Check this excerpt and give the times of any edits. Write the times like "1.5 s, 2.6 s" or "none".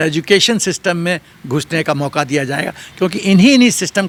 none